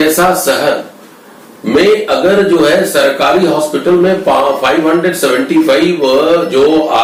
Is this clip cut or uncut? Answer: uncut